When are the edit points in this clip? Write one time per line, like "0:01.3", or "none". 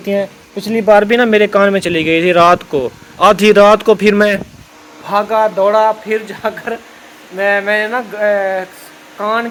none